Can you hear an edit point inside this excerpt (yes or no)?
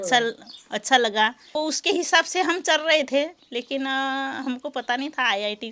yes